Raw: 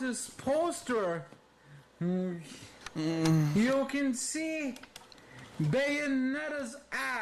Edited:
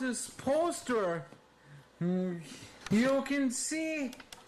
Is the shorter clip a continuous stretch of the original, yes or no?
no